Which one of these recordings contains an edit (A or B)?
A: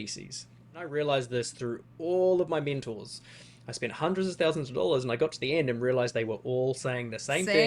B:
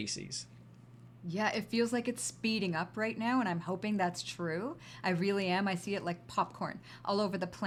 A